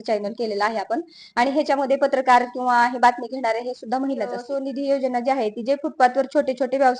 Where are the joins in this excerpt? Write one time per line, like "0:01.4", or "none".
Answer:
0:04.4